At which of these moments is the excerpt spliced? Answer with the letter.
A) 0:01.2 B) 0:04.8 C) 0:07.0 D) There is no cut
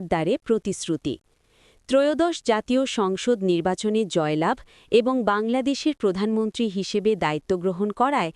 D